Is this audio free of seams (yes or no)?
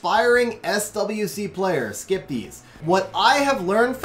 no